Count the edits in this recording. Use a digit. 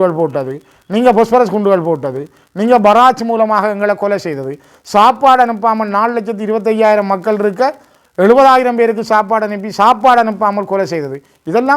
0